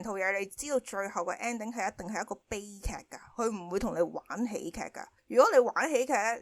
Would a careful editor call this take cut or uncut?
uncut